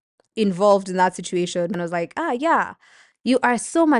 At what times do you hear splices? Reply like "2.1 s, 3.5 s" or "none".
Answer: 1.7 s

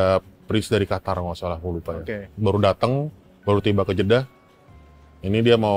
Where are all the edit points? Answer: none

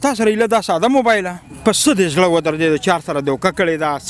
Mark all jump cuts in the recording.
1.5 s

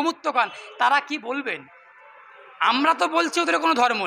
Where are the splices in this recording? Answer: none

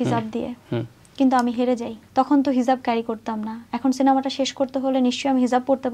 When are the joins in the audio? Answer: 1.0 s, 2.0 s

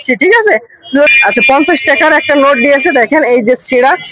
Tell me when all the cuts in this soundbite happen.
1.1 s

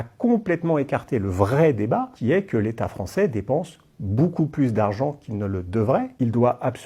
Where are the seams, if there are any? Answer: none

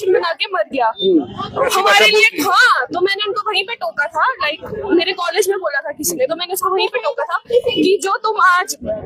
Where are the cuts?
none

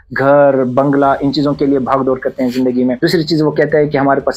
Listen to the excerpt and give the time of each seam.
3.0 s

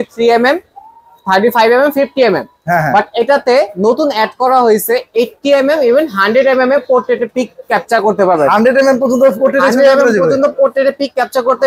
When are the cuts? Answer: none

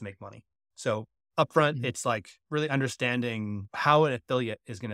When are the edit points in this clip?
2.3 s, 3.6 s

